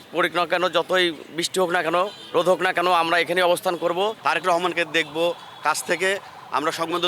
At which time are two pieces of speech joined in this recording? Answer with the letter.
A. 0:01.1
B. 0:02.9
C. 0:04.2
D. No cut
C